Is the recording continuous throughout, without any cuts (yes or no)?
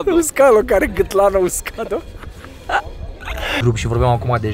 no